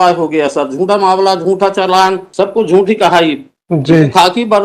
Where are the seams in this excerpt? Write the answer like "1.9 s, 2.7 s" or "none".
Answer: 2.2 s